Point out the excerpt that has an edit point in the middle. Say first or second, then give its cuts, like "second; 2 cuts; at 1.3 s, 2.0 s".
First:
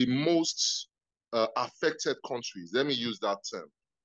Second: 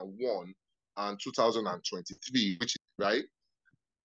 second; 1 cut; at 2.7 s